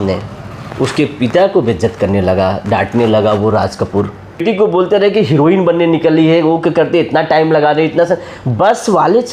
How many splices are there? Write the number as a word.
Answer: one